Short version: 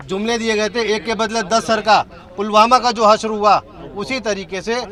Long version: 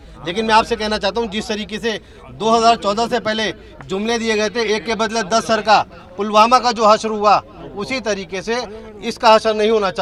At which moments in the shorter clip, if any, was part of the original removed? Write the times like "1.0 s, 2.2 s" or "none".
none